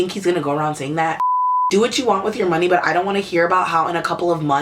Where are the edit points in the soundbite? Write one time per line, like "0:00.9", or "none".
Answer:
0:01.3